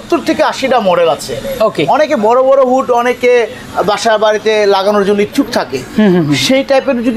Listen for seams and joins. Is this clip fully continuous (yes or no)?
yes